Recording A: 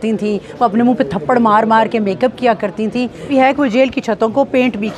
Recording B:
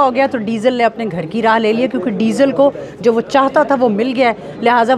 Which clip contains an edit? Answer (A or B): A